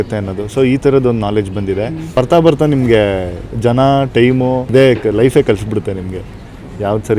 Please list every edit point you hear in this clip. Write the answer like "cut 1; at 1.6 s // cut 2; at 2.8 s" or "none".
cut 1; at 2.0 s // cut 2; at 4.7 s